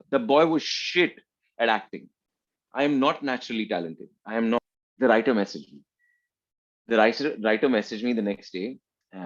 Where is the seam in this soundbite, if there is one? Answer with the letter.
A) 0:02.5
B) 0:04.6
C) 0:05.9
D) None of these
B